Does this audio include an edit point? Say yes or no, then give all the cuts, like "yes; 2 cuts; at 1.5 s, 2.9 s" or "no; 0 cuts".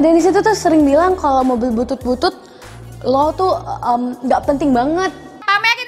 no; 0 cuts